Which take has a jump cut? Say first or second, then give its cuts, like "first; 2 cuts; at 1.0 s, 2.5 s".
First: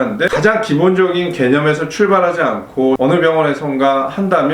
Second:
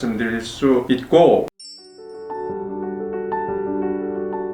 second; 1 cut; at 1.5 s